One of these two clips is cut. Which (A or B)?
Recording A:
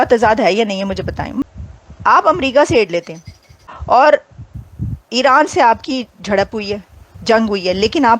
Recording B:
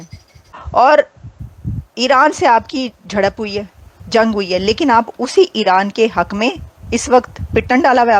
A